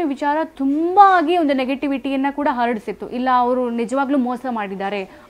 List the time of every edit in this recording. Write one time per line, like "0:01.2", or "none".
none